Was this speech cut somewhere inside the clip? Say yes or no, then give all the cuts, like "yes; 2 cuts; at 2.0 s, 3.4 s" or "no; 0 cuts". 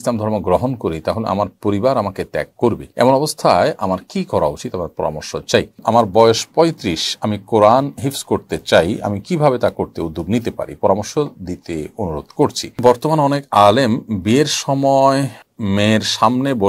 yes; 4 cuts; at 2.8 s, 5.7 s, 12.7 s, 15.4 s